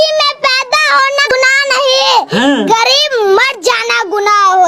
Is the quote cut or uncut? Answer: cut